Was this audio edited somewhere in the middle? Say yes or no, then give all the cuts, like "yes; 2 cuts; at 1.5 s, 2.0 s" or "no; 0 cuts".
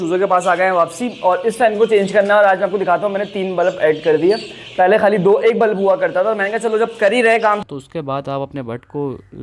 yes; 1 cut; at 7.6 s